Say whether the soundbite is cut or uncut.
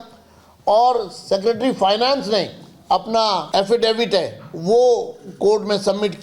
cut